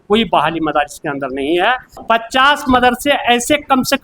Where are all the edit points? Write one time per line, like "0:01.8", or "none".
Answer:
0:02.0